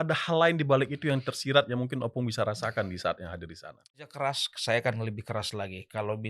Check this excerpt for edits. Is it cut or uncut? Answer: cut